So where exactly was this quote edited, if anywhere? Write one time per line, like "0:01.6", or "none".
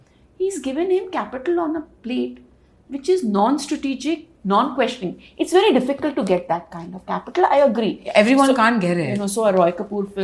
none